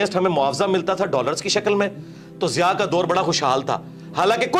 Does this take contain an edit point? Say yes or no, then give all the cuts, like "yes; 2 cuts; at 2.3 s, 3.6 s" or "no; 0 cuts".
no; 0 cuts